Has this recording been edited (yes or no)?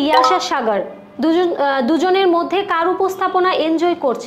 no